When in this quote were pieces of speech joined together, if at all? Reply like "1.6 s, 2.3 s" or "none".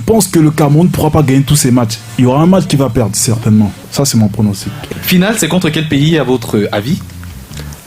3.8 s, 4.8 s